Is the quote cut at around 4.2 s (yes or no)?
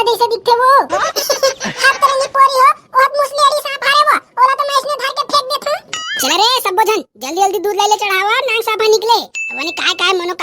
no